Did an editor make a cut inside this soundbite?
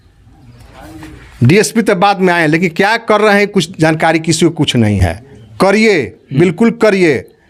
no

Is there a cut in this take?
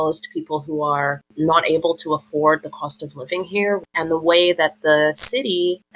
yes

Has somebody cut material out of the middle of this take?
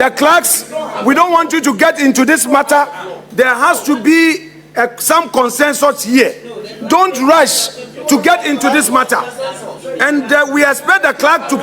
no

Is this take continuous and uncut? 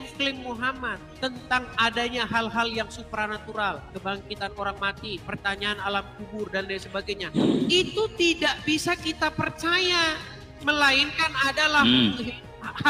yes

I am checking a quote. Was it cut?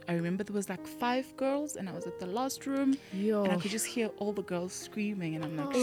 no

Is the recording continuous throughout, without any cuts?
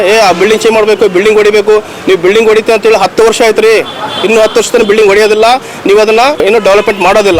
no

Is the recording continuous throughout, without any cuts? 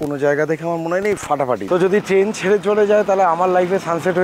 no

